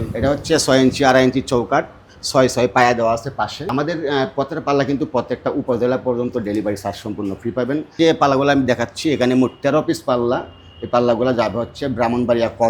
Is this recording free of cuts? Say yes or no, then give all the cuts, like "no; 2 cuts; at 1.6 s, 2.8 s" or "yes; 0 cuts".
no; 2 cuts; at 3.7 s, 8.0 s